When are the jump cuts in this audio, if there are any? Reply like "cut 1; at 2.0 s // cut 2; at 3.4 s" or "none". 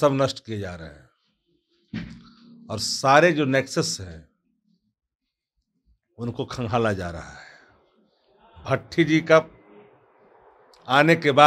none